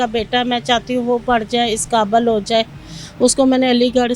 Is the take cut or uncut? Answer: uncut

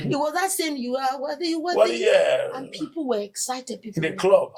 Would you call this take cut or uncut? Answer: uncut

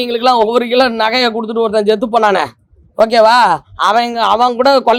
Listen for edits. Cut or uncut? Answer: uncut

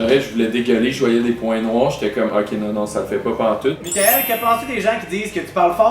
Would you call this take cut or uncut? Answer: cut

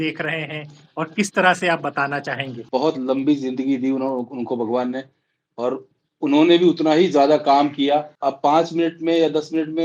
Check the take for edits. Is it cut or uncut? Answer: cut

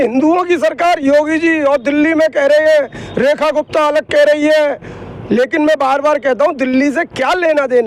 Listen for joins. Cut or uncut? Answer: uncut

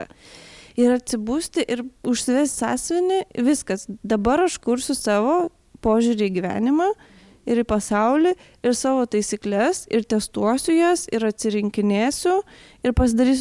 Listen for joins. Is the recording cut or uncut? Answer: cut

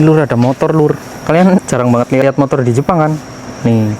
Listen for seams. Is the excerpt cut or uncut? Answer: cut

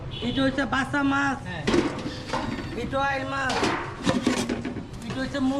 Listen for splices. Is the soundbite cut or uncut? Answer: uncut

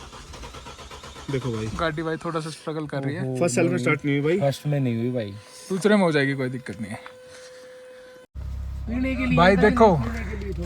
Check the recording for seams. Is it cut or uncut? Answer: cut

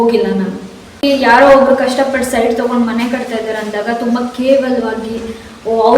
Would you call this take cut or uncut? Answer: cut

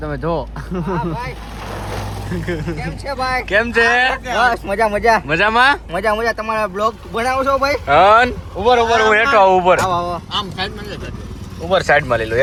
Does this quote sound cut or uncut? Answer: uncut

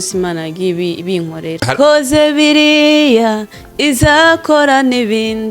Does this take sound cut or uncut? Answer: cut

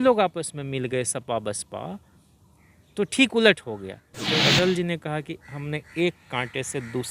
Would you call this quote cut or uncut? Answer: cut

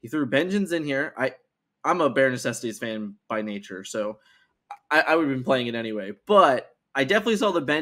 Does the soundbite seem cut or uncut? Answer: uncut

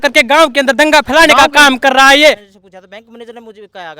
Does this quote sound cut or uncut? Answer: cut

